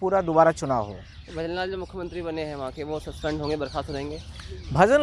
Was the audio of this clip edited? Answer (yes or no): no